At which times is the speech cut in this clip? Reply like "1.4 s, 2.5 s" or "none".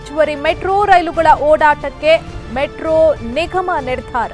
none

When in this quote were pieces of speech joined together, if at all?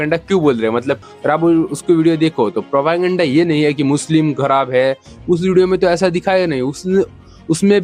none

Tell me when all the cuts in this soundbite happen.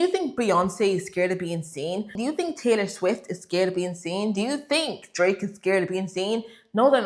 2.2 s

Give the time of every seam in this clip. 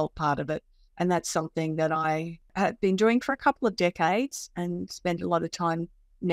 2.5 s

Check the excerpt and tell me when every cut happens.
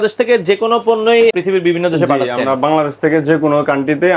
1.3 s

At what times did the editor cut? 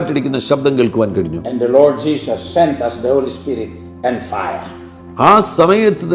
none

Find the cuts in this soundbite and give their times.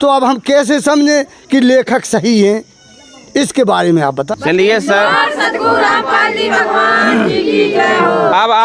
4.3 s

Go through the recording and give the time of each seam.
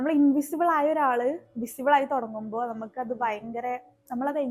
none

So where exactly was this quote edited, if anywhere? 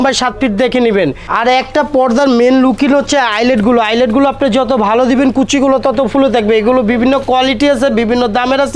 1.2 s

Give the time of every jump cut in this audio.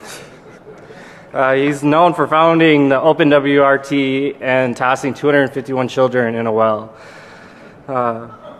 2.7 s

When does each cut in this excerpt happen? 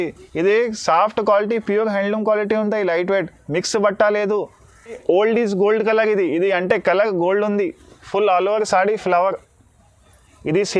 5.0 s

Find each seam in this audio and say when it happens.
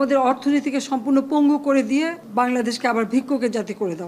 2.2 s

